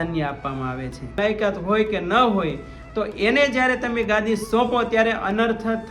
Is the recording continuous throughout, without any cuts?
no; 1 cut; at 1.2 s

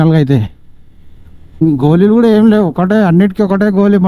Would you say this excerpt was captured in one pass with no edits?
no; 1 cut; at 1.4 s

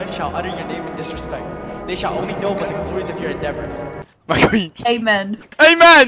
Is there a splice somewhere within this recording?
yes; 2 cuts; at 4.1 s, 5.0 s

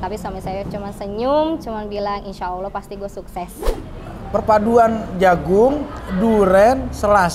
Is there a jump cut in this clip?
yes; 1 cut; at 3.7 s

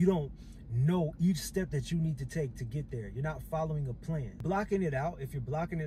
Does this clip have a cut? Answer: yes; 1 cut; at 4.4 s

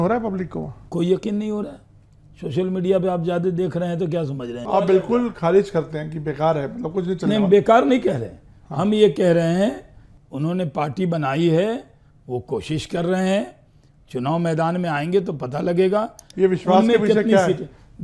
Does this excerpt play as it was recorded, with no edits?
no; 2 cuts; at 4.6 s, 16.3 s

